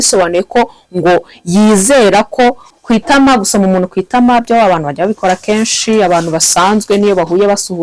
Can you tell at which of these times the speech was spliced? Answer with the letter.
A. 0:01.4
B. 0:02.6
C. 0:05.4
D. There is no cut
B